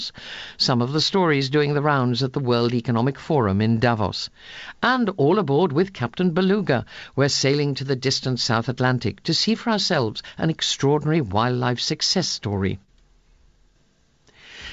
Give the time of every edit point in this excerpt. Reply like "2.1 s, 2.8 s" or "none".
4.2 s

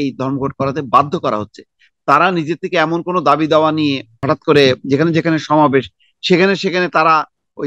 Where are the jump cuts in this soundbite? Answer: 4.2 s

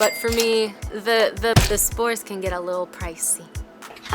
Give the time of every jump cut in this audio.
1.6 s

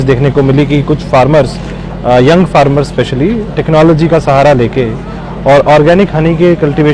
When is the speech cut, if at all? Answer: none

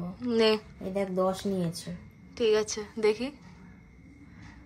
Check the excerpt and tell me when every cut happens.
none

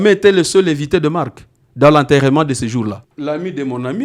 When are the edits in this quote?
3.1 s

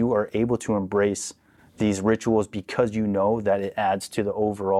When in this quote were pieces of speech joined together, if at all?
none

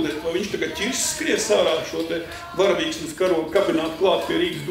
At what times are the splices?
none

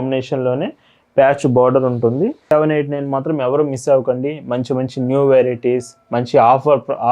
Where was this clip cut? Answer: 2.5 s

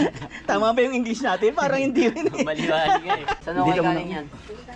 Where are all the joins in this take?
3.4 s

